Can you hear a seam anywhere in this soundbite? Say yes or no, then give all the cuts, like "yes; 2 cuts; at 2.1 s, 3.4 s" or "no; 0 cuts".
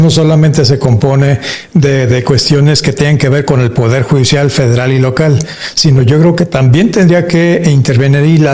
no; 0 cuts